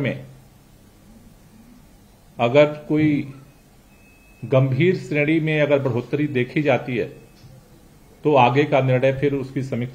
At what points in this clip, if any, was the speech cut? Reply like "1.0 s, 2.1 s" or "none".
none

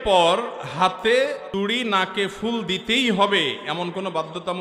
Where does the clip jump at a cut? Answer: none

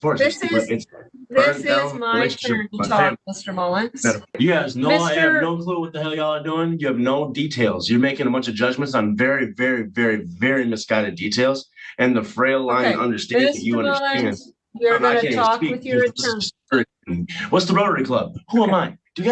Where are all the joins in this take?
4.4 s

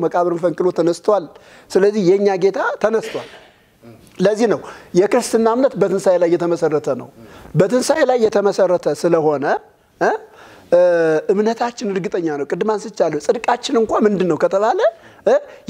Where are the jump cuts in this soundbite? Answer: none

